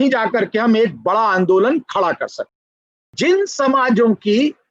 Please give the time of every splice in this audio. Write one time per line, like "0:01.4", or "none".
0:03.1